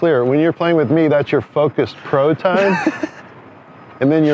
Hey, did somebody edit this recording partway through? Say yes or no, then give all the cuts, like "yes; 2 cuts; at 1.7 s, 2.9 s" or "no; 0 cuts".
no; 0 cuts